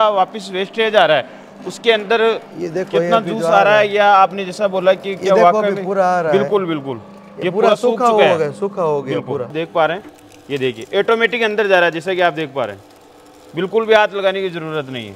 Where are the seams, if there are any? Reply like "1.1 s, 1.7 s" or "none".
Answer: 9.5 s